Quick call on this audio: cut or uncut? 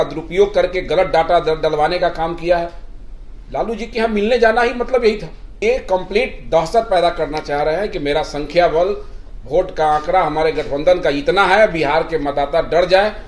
cut